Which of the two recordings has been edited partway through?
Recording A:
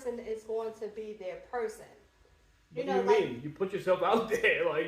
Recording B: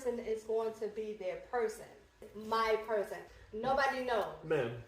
B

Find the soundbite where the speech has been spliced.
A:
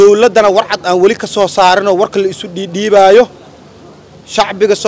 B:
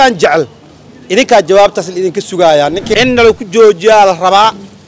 B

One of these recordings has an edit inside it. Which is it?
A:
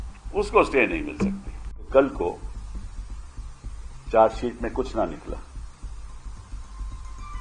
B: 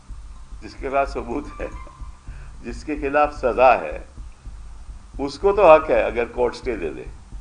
A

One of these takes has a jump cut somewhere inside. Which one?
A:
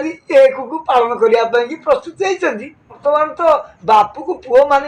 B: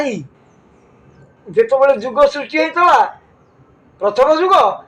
A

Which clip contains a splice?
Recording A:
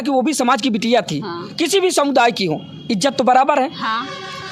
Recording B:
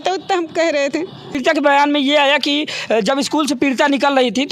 B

